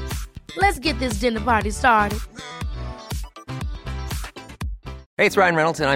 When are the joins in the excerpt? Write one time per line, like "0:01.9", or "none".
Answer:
0:05.0